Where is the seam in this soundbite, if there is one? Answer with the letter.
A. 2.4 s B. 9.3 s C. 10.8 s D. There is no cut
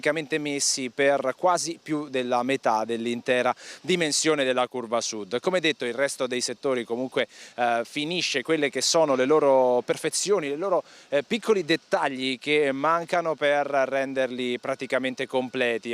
A